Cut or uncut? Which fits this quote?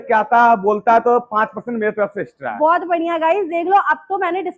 uncut